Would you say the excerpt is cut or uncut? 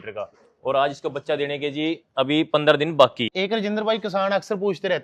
cut